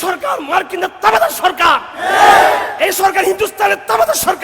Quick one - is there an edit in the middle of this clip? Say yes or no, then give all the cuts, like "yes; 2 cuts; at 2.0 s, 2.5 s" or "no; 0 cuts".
no; 0 cuts